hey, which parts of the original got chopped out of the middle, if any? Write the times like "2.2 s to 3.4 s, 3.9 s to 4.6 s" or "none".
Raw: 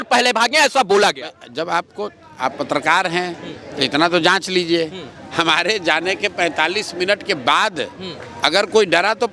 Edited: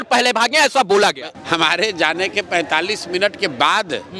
1.3 s to 5.2 s